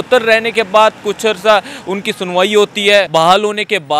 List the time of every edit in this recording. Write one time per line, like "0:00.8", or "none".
0:03.1